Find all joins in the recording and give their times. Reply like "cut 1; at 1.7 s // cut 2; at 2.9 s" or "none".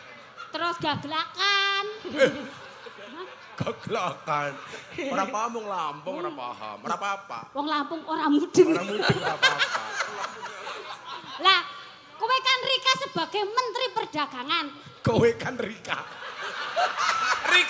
none